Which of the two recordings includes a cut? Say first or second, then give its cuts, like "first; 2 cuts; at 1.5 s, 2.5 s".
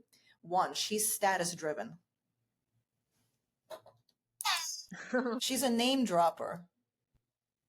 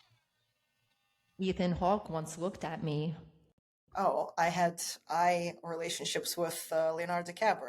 first; 1 cut; at 5.4 s